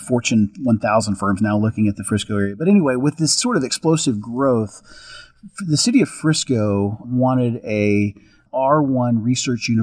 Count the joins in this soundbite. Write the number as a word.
one